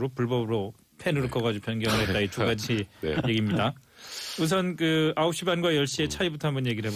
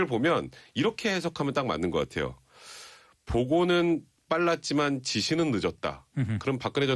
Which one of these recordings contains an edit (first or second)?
second